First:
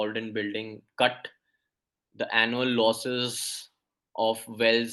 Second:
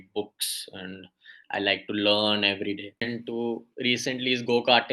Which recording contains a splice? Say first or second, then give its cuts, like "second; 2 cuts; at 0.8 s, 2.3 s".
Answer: second; 1 cut; at 3.0 s